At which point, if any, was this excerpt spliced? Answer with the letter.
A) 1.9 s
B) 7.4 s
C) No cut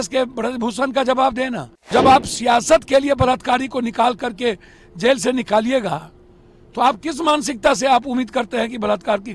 A